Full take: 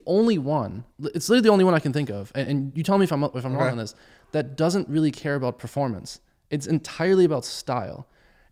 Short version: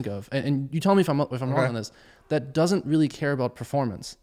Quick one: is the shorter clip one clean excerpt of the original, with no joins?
yes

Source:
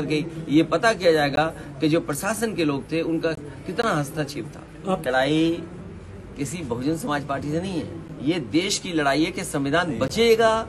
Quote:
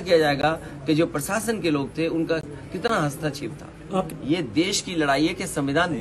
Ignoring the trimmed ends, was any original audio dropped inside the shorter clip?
yes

